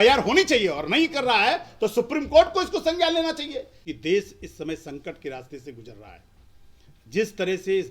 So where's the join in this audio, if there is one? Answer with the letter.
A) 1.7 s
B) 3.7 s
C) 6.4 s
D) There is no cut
B